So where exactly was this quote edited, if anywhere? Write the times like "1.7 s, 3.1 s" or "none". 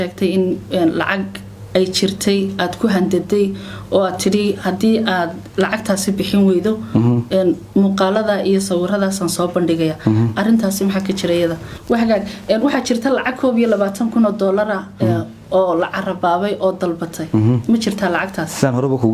11.7 s